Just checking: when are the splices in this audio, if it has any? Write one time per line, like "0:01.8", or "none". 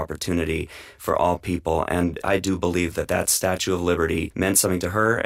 0:02.2
0:04.3